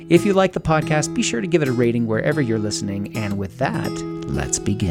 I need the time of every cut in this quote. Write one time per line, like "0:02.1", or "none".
none